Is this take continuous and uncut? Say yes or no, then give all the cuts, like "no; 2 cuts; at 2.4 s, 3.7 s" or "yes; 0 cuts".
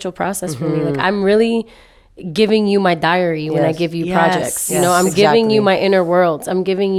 yes; 0 cuts